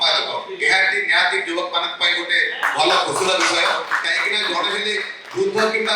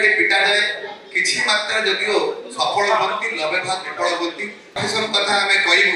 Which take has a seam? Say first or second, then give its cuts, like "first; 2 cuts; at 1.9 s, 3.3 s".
second; 1 cut; at 4.8 s